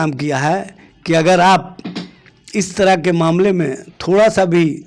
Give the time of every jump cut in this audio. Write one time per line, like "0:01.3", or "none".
none